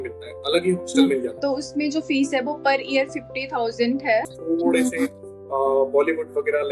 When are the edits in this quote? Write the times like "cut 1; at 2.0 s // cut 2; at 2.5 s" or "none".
cut 1; at 1.4 s // cut 2; at 4.3 s